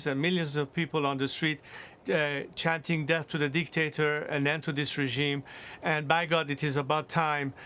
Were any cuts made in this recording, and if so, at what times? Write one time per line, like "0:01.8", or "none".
none